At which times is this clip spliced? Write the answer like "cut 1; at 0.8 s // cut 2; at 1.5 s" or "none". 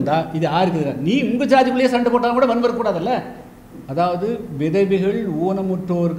cut 1; at 3.6 s